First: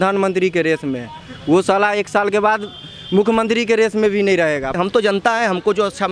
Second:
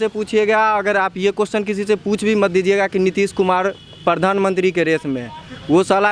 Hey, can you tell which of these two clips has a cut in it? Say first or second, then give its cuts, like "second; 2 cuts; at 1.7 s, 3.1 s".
first; 1 cut; at 4.8 s